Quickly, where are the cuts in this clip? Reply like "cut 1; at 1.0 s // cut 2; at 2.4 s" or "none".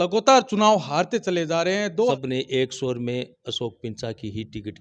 cut 1; at 2.1 s